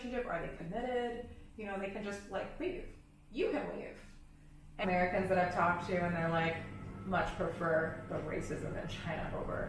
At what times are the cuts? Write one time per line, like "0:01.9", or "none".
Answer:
0:04.8